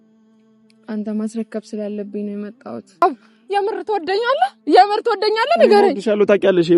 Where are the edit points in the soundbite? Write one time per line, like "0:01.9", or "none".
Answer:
0:03.0